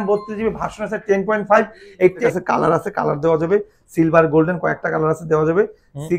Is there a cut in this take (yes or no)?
yes